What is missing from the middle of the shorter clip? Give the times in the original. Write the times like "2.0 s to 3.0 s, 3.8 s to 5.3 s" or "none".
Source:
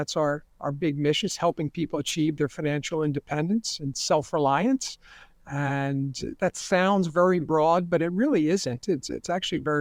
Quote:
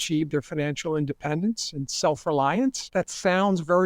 4.9 s to 6.3 s